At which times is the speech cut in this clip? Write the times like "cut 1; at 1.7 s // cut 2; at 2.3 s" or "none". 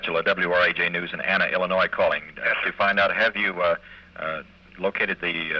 none